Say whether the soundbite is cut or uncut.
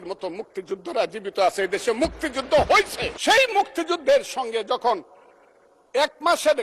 cut